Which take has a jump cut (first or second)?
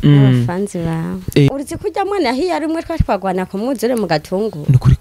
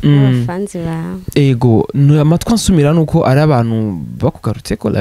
first